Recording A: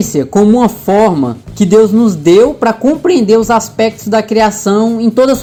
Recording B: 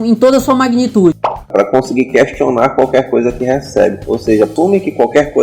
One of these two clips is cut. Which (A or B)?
B